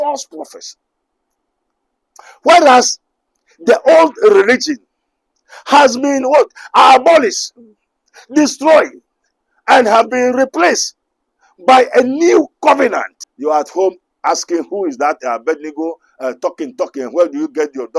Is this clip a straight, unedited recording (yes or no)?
no